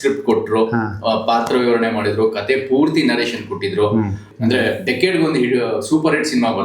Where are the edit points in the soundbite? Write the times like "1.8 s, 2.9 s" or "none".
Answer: 4.3 s